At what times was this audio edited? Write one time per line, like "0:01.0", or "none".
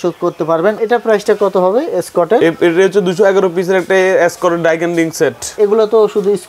0:00.8
0:05.6